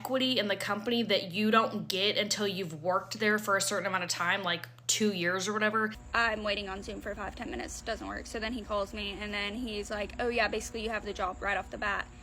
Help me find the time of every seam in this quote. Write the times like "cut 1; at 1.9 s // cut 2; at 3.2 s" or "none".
cut 1; at 6.0 s